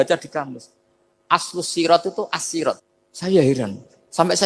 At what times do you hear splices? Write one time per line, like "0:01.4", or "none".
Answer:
0:02.8